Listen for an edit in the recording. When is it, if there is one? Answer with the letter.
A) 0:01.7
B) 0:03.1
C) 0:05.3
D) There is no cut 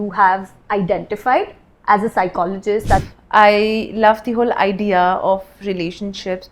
B